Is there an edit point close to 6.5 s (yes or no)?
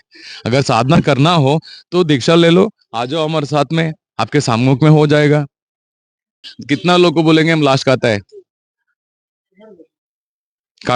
yes